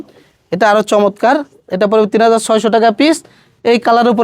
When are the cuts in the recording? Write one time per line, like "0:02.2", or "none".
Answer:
none

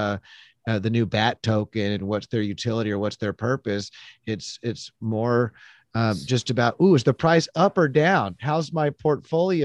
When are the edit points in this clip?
none

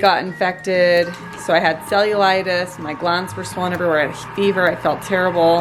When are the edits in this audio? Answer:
none

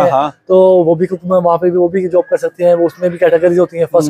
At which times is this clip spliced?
none

